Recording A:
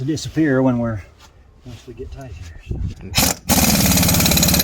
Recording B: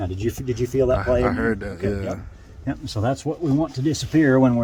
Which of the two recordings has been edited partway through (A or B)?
A